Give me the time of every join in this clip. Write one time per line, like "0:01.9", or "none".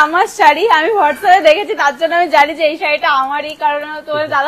none

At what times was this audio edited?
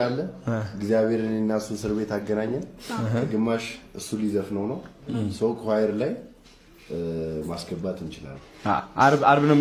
none

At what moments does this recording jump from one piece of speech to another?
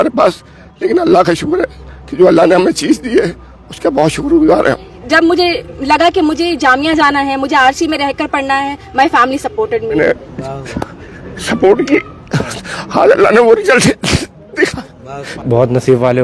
0:05.0
0:10.0
0:15.3

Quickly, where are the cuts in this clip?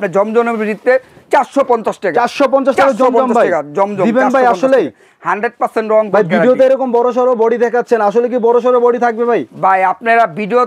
none

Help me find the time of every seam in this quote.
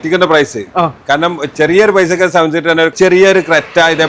0:02.9

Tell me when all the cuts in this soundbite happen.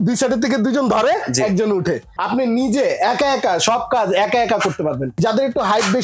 0:02.1
0:05.1

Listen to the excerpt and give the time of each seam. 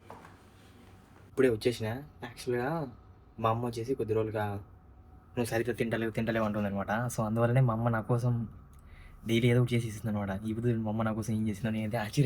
none

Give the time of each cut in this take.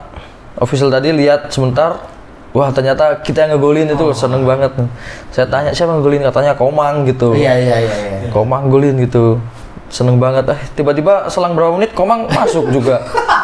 none

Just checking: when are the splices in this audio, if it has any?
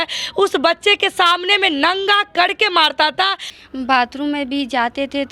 0:03.5

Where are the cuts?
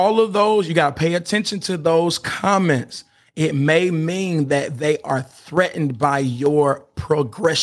none

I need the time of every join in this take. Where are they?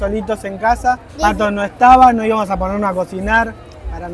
0:01.1

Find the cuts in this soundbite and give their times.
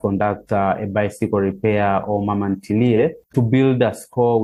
none

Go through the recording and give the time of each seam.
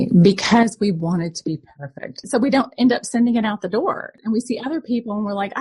0:02.3
0:04.1

